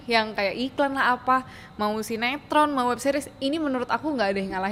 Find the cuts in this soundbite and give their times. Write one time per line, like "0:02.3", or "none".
none